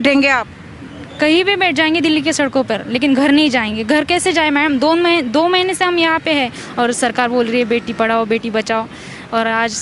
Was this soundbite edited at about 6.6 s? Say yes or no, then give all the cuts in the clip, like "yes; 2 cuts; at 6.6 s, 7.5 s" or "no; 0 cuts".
yes; 1 cut; at 6.6 s